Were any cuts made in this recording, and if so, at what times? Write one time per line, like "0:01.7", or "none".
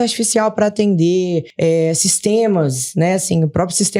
0:01.5